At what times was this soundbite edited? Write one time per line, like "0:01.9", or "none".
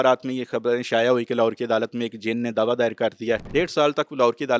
0:03.4